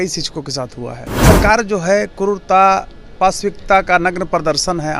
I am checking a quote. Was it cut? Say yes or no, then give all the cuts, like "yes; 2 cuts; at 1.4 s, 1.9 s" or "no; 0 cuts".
yes; 1 cut; at 1.1 s